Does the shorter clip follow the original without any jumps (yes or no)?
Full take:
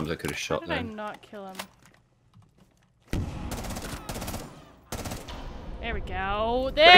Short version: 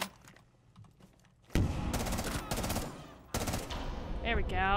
yes